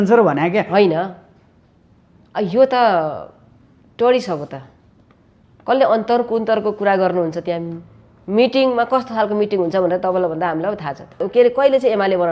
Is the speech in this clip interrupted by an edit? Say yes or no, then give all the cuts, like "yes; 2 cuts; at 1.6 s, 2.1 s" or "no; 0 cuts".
yes; 1 cut; at 11.2 s